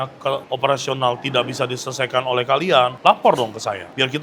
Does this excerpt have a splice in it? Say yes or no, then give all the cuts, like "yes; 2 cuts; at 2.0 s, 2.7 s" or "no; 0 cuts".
no; 0 cuts